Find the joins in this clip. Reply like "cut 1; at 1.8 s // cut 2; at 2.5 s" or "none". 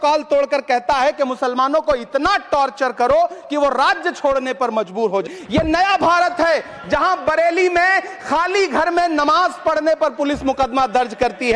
cut 1; at 5.2 s